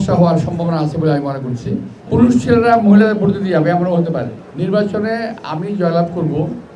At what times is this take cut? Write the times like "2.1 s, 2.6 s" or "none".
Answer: 2.0 s, 4.4 s